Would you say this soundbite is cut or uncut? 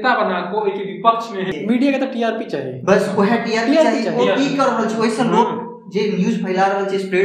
cut